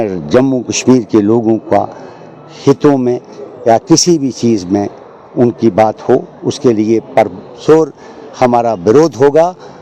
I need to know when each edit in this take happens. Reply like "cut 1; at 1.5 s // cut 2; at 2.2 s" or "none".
none